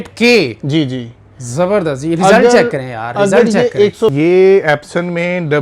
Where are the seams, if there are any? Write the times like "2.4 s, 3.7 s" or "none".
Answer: 4.1 s